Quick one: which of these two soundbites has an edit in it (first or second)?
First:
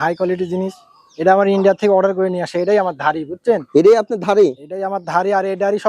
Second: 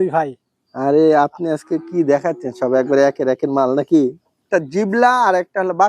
second